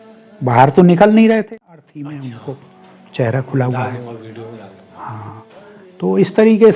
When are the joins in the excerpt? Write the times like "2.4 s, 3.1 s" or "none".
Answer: 1.5 s

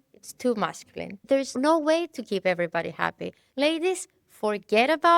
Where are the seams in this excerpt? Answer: 1.5 s, 3.4 s

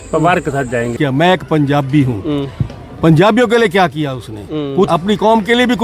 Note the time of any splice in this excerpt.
0.9 s, 4.9 s

